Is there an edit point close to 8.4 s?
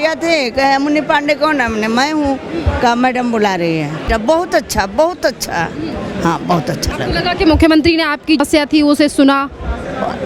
yes; 2 cuts; at 4.0 s, 8.4 s

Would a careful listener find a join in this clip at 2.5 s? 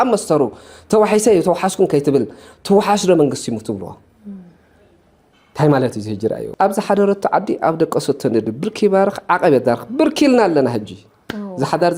no; 1 cut; at 6.5 s

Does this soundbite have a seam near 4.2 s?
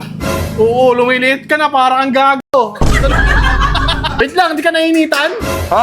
yes; 1 cut; at 4.2 s

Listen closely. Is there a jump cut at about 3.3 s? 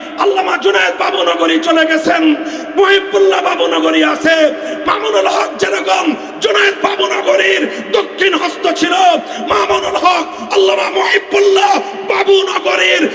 no; 0 cuts

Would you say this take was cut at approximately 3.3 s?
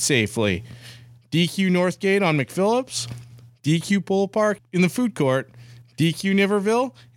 no; 1 cut; at 4.6 s

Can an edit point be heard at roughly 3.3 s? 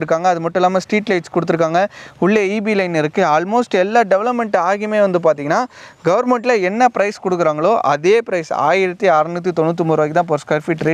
no; 0 cuts

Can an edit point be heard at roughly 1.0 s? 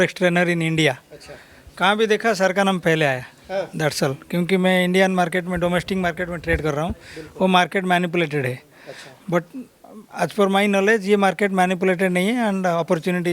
no; 0 cuts

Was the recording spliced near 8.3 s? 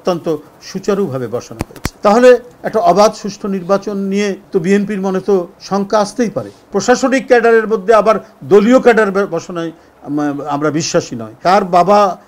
no; 5 cuts; at 1.8 s, 4.4 s, 5.6 s, 6.6 s, 11.4 s

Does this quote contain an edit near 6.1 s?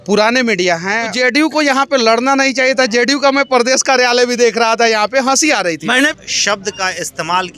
yes; 2 cuts; at 1.1 s, 6.1 s

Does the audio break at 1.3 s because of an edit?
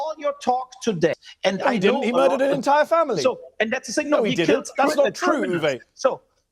yes; 1 cut; at 1.3 s

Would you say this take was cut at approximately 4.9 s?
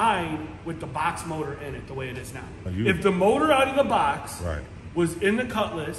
no; 1 cut; at 2.6 s

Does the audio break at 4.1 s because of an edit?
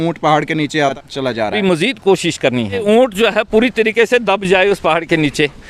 no; 2 cuts; at 1.5 s, 2.8 s

